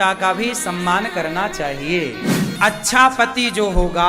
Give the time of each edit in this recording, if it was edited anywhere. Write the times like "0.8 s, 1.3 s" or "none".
2.5 s